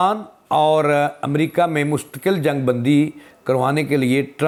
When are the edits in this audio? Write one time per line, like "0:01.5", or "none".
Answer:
none